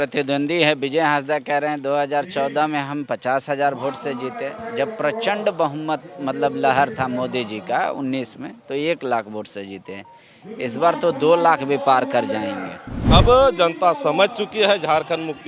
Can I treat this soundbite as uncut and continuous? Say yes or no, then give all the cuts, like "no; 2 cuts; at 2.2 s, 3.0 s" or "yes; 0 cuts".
no; 1 cut; at 13.0 s